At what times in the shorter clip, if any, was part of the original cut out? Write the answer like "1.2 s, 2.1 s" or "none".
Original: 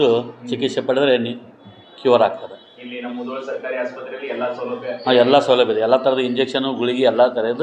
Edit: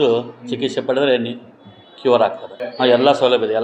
2.6 s